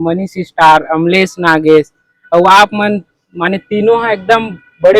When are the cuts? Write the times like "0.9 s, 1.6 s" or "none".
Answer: none